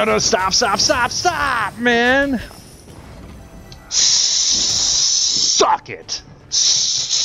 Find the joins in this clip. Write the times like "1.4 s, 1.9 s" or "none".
2.9 s

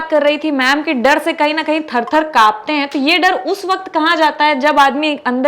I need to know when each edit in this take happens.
none

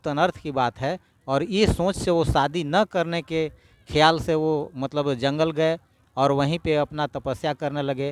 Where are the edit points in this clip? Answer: none

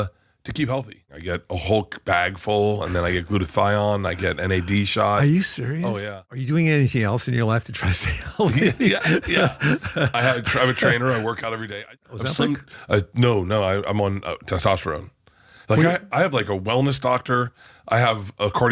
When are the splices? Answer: 1.1 s, 6.4 s, 11.9 s

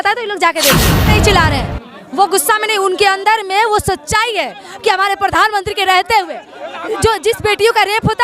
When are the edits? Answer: 0.9 s

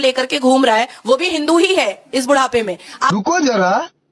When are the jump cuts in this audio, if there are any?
none

